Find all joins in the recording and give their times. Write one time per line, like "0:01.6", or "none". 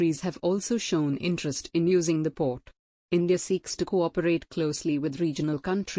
none